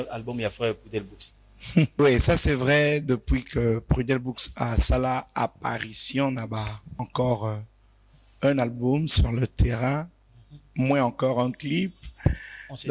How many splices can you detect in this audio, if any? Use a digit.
2